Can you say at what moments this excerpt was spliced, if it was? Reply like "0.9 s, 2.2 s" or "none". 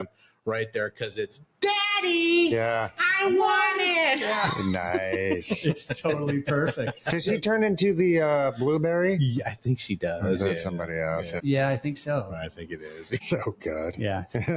11.3 s, 13.2 s